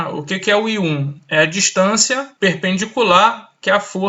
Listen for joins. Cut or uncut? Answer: cut